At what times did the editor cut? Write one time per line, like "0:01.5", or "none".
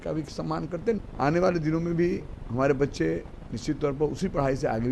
0:01.0